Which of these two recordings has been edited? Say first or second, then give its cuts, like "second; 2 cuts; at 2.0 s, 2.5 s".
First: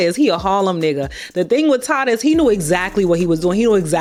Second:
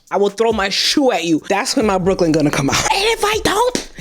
second; 1 cut; at 2.8 s